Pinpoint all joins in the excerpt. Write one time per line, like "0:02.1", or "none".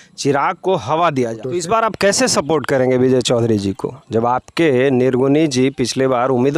0:01.4